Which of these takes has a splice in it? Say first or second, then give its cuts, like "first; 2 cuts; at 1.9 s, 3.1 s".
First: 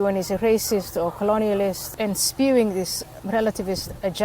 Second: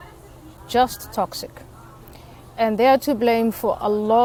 first; 2 cuts; at 1.9 s, 3.1 s